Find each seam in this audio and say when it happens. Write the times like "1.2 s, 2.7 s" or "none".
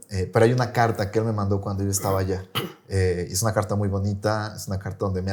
none